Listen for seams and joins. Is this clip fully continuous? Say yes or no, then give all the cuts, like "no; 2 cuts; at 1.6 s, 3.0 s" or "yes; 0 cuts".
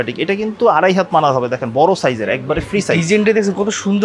yes; 0 cuts